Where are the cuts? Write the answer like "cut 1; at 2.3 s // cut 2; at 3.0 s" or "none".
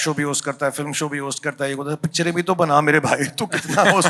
none